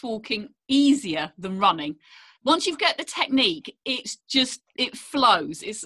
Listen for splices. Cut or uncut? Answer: uncut